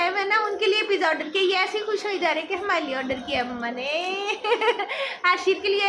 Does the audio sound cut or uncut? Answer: uncut